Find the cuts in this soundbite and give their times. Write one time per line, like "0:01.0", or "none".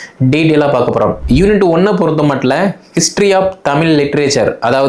0:01.2